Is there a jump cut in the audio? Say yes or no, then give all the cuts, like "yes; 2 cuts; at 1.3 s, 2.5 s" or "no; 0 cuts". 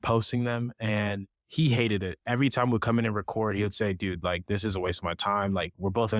no; 0 cuts